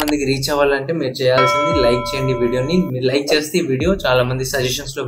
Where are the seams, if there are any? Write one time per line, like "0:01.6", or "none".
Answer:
none